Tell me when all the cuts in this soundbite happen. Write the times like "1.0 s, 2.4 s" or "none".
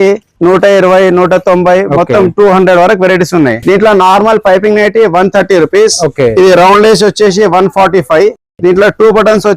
3.6 s